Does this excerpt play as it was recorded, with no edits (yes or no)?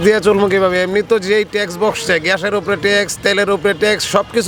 yes